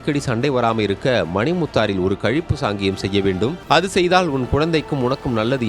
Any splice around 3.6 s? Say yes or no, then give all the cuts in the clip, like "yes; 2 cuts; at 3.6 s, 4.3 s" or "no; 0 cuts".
yes; 1 cut; at 3.6 s